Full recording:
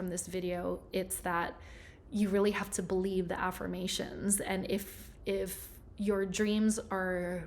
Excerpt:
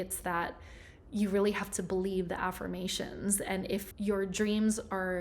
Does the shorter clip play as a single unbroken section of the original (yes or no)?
no